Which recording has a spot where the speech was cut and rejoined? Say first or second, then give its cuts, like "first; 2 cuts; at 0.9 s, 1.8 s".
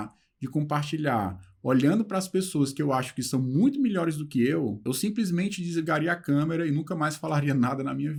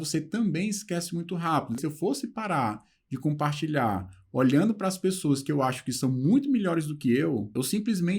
second; 1 cut; at 1.8 s